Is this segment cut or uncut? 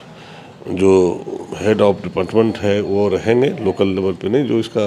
uncut